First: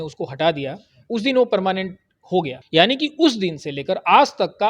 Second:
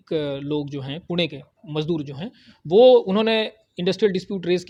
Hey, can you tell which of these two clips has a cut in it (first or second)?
first